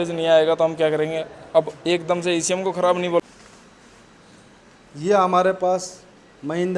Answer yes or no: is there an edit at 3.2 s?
yes